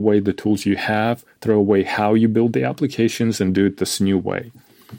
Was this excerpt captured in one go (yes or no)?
yes